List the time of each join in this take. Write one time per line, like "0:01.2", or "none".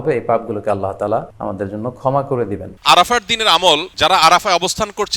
0:01.3
0:02.7
0:03.9